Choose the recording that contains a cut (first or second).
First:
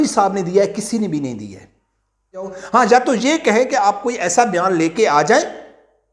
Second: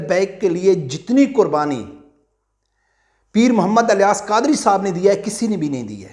first